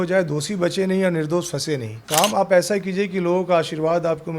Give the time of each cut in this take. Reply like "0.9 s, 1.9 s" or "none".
2.0 s